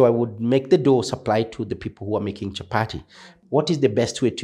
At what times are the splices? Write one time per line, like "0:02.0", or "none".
0:03.3

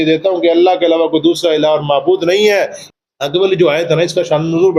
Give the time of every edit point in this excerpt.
0:02.8

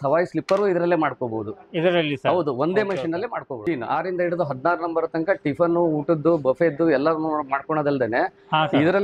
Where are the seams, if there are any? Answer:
0:03.6

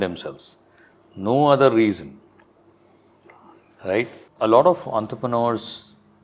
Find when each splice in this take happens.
0:04.2

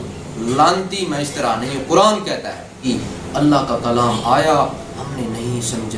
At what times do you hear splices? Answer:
0:02.8

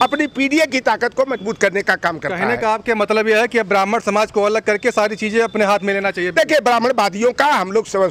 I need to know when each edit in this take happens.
none

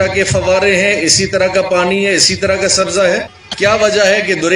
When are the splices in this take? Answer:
0:03.4

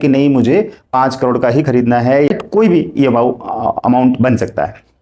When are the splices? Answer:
0:02.3

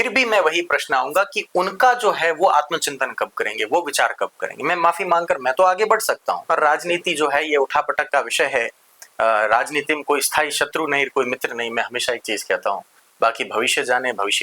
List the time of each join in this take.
0:06.4

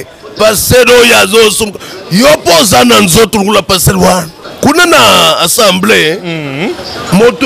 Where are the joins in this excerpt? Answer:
0:04.4

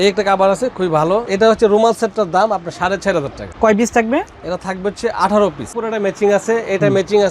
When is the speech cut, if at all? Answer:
0:01.3
0:05.7

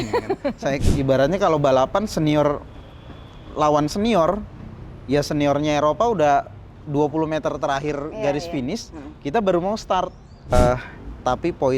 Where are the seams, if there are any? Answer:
0:00.8
0:10.5

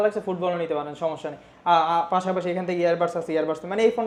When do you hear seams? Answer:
none

